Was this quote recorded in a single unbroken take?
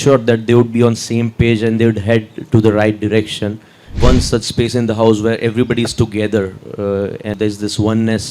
no; 2 cuts; at 4.0 s, 7.4 s

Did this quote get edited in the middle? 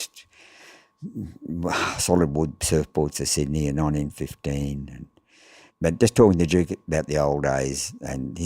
yes; 1 cut; at 5.6 s

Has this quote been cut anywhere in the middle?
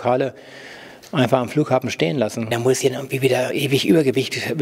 yes; 1 cut; at 2.5 s

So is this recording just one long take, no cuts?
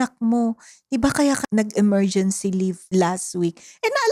no; 2 cuts; at 1.4 s, 2.8 s

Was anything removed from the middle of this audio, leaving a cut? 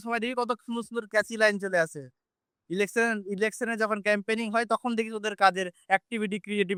no; 0 cuts

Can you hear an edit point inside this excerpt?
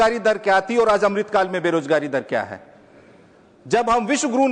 no; 0 cuts

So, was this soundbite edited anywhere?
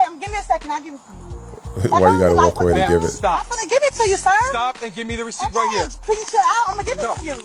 no; 0 cuts

